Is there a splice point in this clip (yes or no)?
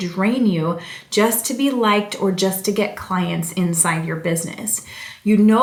no